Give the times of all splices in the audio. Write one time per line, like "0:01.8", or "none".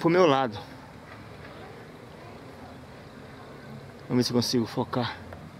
none